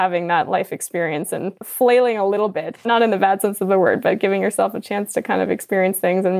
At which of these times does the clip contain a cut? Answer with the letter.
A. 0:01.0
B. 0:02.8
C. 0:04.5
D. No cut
B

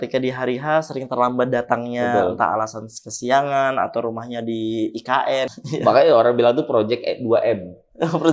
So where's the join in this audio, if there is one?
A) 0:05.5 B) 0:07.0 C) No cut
A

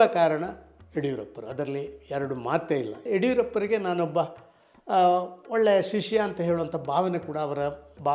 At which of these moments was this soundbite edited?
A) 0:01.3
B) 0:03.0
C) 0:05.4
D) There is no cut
B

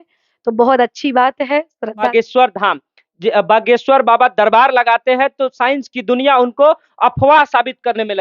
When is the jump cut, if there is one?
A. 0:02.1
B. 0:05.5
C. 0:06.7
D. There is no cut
A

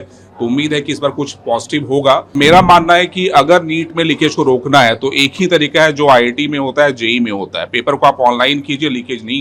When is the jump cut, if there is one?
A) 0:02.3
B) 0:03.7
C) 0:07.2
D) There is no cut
A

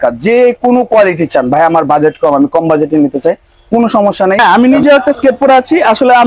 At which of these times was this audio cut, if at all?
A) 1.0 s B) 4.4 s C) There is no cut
B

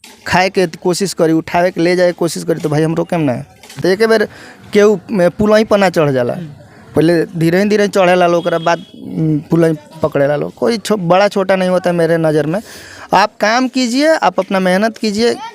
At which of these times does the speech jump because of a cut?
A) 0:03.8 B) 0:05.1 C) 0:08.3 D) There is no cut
A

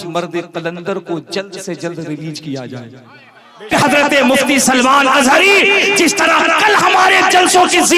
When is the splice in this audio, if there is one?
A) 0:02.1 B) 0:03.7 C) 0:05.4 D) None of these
B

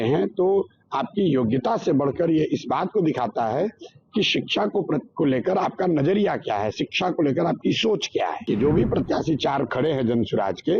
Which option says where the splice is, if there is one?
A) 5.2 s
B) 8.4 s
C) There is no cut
B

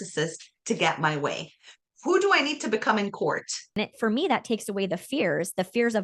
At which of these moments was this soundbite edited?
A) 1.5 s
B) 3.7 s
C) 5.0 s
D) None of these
B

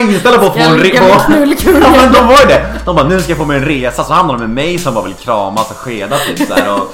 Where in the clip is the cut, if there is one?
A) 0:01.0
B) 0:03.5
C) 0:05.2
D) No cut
D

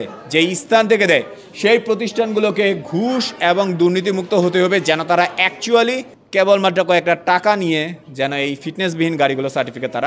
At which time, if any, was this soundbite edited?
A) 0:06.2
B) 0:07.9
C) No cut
A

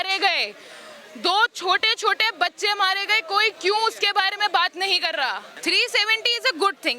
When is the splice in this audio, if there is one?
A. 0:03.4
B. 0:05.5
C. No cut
B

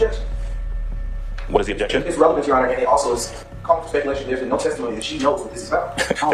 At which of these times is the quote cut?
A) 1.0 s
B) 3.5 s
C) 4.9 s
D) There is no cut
D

